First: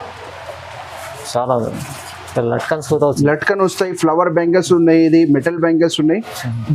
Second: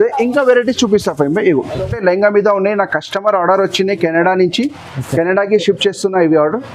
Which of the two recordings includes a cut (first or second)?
second